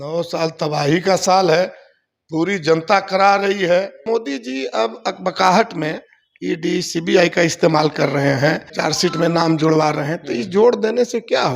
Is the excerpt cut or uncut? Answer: cut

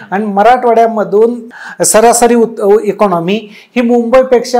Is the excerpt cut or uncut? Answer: cut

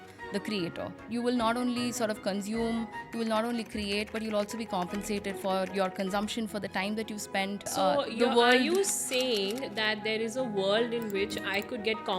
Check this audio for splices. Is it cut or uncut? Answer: cut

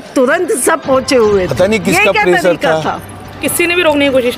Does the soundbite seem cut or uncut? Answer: cut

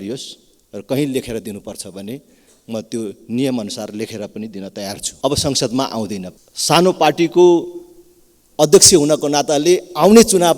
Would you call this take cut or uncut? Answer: cut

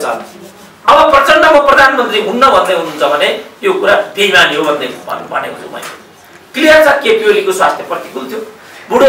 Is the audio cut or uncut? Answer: uncut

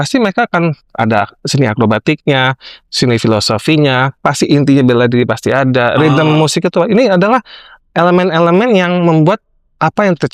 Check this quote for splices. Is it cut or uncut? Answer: uncut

